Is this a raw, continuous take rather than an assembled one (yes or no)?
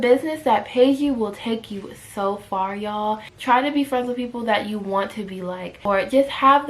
no